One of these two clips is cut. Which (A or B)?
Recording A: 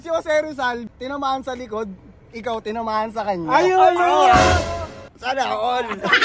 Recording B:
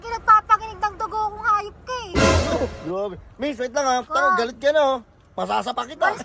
A